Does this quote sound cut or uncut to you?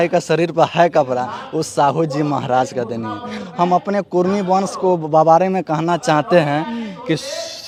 uncut